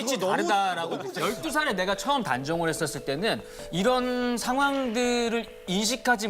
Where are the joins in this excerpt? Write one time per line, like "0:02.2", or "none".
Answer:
0:01.1